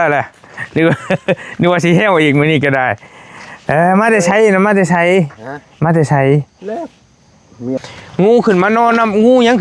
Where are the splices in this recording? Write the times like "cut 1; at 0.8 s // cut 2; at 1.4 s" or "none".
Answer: cut 1; at 7.9 s